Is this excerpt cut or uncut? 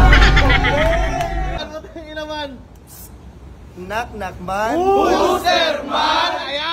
cut